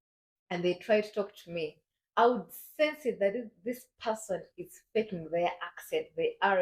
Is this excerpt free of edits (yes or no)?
yes